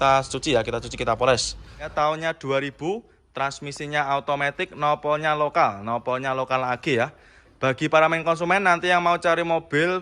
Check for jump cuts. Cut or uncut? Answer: cut